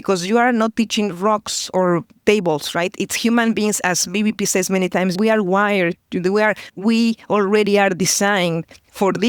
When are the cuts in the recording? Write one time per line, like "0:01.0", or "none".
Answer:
0:05.1

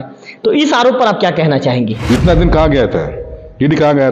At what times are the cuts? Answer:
0:02.0

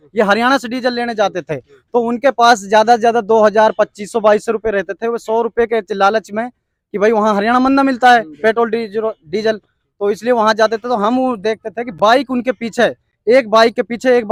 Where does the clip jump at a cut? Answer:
none

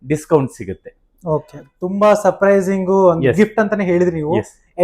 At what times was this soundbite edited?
none

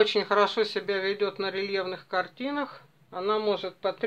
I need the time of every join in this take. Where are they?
0:03.0

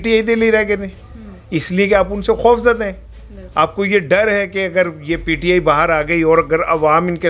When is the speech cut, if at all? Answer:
none

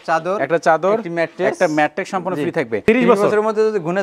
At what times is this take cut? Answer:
0:02.8

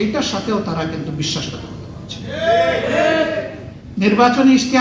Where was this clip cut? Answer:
none

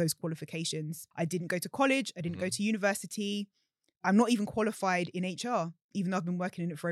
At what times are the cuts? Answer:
0:01.0

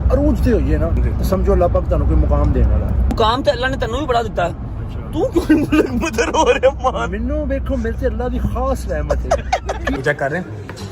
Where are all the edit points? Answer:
0:01.0
0:03.1
0:10.0

